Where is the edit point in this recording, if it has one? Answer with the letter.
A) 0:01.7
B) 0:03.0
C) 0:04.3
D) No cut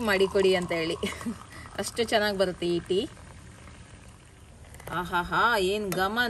C